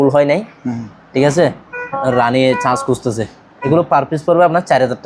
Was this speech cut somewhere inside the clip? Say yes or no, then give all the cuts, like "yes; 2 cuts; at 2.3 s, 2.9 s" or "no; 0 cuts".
yes; 1 cut; at 3.5 s